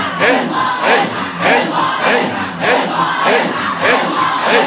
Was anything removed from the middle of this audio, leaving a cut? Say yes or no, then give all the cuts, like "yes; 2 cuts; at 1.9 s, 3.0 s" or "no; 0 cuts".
no; 0 cuts